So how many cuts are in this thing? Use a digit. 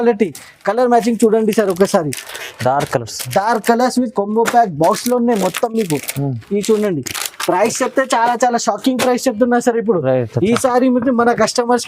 0